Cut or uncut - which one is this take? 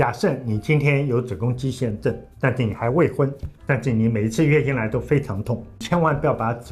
cut